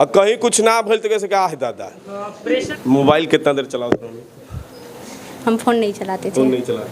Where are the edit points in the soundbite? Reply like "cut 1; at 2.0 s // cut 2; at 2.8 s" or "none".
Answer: cut 1; at 2.5 s

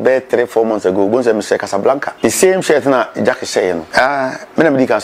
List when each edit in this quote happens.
cut 1; at 2.1 s // cut 2; at 3.8 s

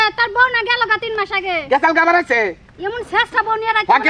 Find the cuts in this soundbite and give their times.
none

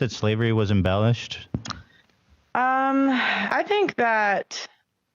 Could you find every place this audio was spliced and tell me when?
cut 1; at 1.3 s // cut 2; at 3.4 s

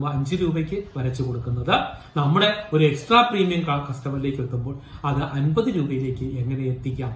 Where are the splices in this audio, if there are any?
none

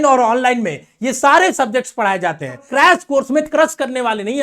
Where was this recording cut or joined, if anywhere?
cut 1; at 2.6 s

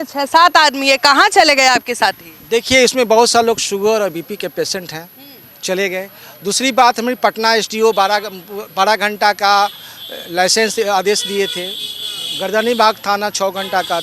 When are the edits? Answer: none

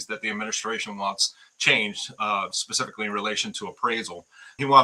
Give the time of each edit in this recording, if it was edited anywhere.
none

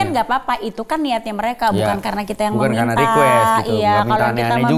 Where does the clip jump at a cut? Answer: none

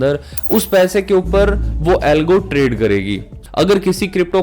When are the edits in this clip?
cut 1; at 3.4 s

